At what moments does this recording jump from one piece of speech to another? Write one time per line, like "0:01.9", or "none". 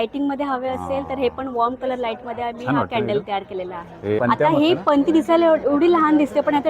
0:04.2

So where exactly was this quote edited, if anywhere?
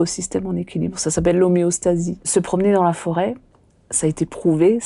0:02.3

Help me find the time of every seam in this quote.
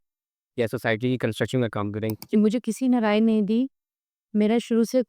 0:02.4

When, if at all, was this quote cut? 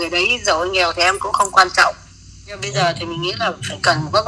0:02.6

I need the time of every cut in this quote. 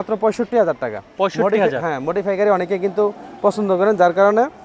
none

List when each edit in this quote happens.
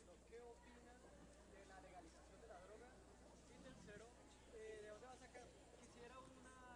none

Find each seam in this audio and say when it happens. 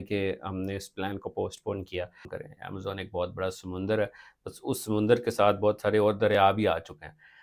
0:02.3

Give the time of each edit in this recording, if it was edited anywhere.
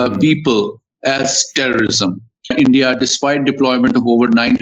0:02.5

